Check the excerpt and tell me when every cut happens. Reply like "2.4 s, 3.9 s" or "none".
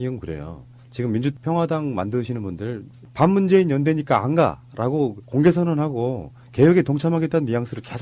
none